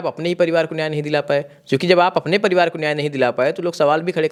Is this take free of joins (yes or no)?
yes